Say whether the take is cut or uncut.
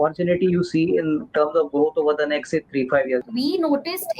cut